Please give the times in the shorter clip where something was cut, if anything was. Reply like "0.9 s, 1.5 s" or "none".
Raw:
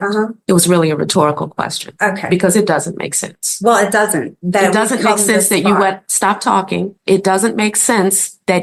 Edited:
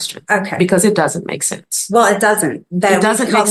none